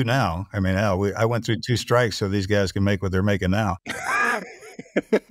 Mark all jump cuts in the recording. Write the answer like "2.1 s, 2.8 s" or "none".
4.3 s